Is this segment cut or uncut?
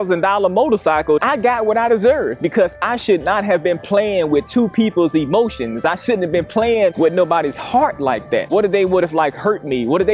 cut